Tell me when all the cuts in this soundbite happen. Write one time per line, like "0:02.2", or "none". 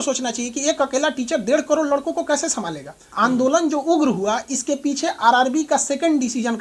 0:03.1